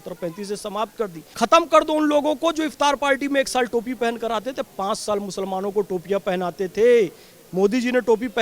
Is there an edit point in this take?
yes; 1 cut; at 1.2 s

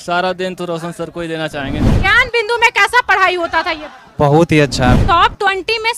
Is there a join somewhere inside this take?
yes; 2 cuts; at 1.9 s, 5.0 s

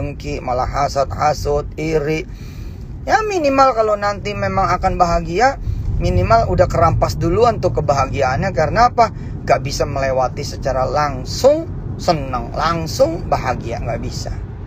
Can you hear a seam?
no; 0 cuts

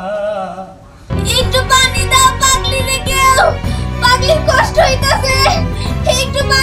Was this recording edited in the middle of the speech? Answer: yes; 1 cut; at 1.1 s

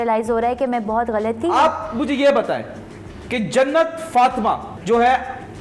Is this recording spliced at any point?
yes; 1 cut; at 1.5 s

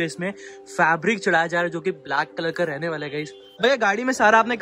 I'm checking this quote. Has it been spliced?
yes; 1 cut; at 3.5 s

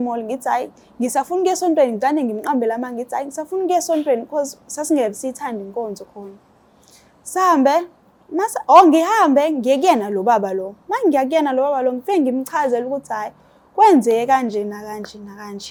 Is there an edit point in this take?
no; 0 cuts

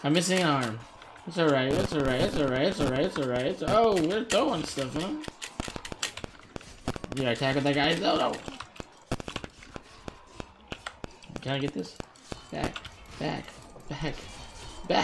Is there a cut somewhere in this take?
no; 0 cuts

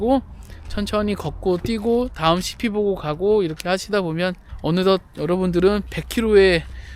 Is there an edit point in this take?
yes; 1 cut; at 4.5 s

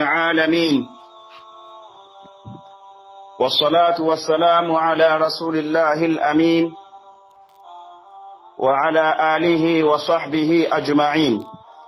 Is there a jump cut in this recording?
yes; 2 cuts; at 0.9 s, 3.4 s

